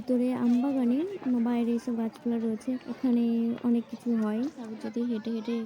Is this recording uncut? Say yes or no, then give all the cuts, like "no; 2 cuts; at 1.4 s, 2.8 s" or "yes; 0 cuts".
no; 2 cuts; at 2.9 s, 4.7 s